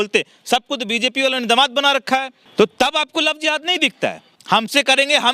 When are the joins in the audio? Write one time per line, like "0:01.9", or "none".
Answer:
0:02.4
0:04.3